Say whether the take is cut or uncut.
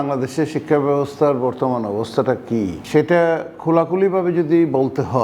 cut